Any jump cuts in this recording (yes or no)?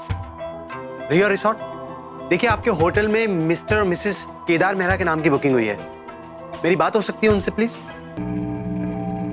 yes